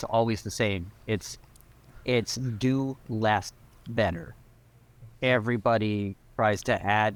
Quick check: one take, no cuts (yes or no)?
yes